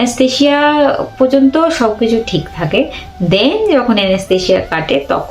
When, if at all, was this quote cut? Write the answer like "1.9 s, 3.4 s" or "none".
none

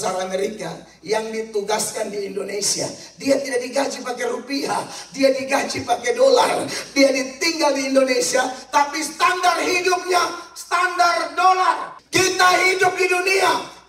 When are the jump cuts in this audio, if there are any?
11.9 s

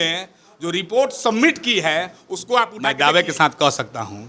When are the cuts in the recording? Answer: 2.8 s

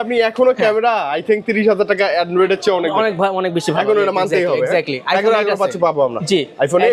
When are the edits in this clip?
none

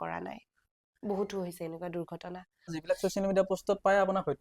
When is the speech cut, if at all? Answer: 2.8 s

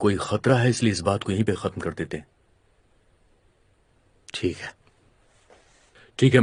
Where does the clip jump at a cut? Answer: none

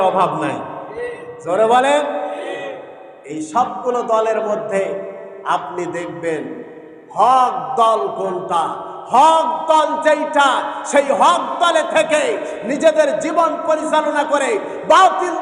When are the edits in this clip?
none

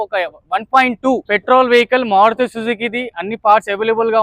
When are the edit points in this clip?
1.2 s

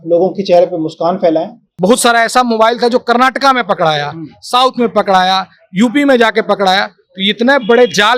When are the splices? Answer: 1.8 s

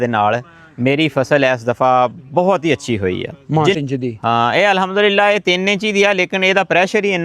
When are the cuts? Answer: 3.8 s

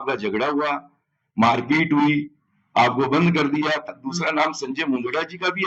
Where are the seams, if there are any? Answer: 3.9 s

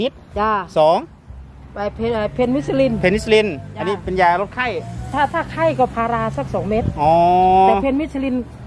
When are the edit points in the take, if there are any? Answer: none

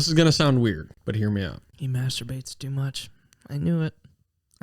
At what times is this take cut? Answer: 0.9 s, 1.7 s

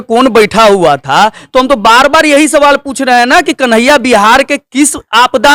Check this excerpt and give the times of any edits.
none

